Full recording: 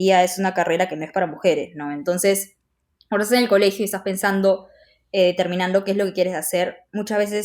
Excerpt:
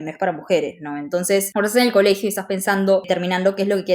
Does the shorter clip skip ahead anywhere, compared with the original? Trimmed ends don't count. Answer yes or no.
yes